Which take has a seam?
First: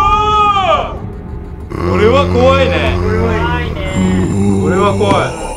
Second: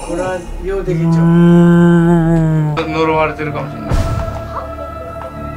second; 1 cut; at 2.8 s

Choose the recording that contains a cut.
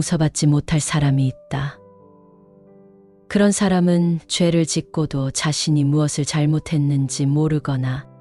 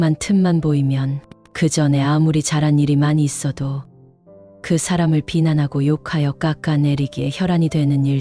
first; 2 cuts; at 1.8 s, 3.3 s

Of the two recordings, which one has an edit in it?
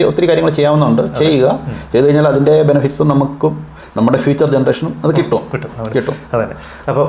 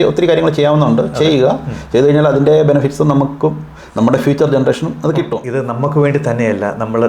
second; 1 cut; at 5.5 s

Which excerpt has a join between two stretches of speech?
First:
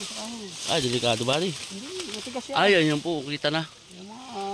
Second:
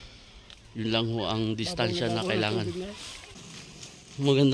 second; 1 cut; at 3.1 s

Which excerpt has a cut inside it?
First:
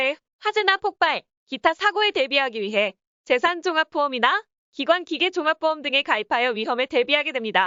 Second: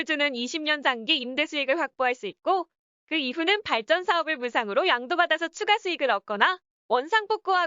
second; 1 cut; at 3.2 s

